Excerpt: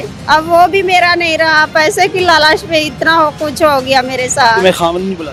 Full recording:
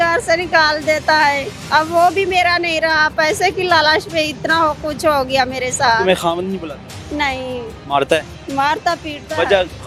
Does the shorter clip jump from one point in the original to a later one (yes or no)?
no